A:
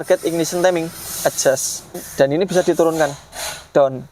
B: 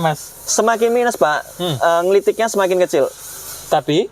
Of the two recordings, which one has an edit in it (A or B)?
A